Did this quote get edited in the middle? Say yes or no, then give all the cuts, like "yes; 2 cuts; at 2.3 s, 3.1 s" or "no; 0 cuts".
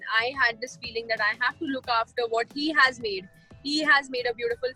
no; 0 cuts